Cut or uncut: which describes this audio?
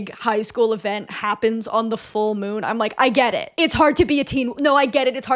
uncut